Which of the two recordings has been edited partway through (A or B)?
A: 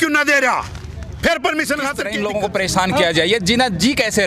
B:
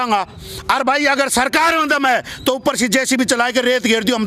A